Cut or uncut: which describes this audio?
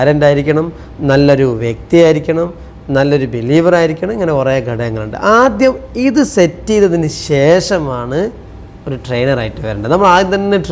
uncut